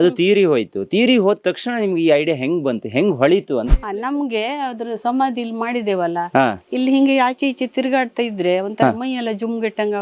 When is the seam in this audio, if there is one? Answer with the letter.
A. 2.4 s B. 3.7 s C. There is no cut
B